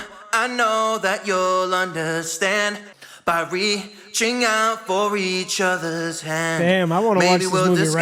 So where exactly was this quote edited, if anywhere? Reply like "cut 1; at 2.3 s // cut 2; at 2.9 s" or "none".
cut 1; at 2.9 s

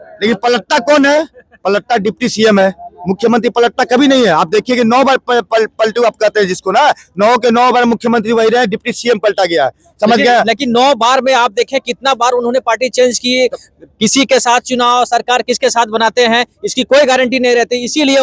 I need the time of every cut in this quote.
none

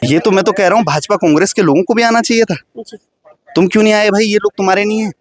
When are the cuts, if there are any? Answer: none

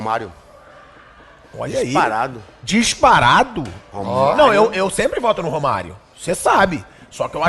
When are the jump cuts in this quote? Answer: none

